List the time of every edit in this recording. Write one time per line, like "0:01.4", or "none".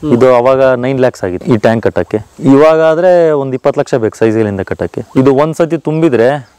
0:01.4
0:02.3
0:05.0